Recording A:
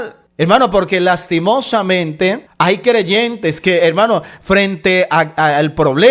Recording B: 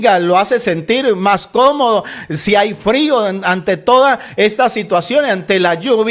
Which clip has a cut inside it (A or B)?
A